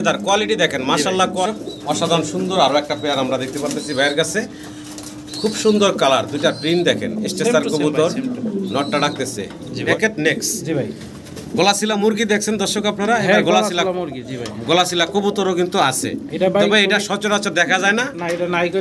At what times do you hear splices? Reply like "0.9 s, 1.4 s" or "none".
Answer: 1.4 s, 9.9 s